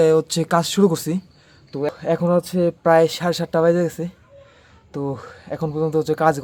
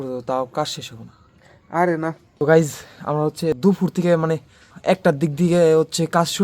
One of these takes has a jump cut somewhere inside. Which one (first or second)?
second